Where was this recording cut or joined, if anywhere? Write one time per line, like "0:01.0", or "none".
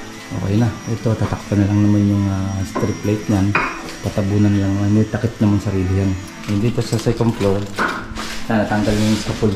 0:06.3